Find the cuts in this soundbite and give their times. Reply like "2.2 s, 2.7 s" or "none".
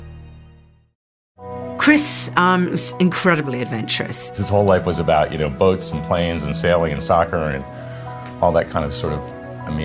none